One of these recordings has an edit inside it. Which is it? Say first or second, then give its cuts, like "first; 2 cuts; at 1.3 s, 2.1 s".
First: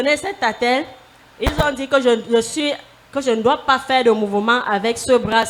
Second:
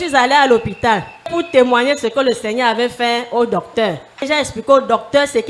second; 1 cut; at 4.3 s